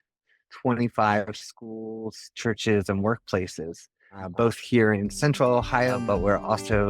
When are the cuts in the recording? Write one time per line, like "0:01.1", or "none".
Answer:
0:06.0